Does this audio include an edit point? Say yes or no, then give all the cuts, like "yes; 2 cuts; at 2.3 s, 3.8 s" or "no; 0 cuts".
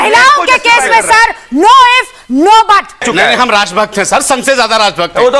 yes; 1 cut; at 3.0 s